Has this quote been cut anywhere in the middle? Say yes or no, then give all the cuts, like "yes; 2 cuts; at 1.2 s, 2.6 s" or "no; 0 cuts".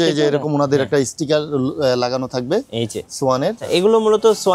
yes; 1 cut; at 3.6 s